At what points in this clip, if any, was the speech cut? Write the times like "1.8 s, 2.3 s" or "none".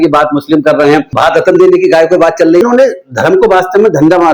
1.1 s, 2.6 s